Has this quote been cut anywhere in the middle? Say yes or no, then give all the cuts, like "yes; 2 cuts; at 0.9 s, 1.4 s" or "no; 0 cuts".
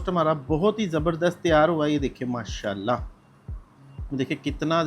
no; 0 cuts